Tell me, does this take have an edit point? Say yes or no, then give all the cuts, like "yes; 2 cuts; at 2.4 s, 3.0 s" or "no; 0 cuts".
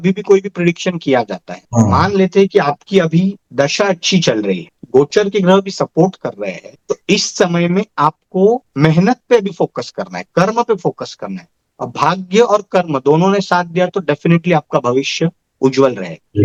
no; 0 cuts